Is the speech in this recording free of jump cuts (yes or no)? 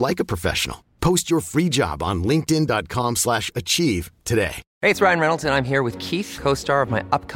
no